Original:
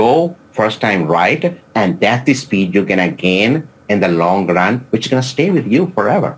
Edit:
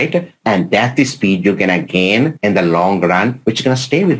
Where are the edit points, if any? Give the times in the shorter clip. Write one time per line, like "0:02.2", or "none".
0:02.4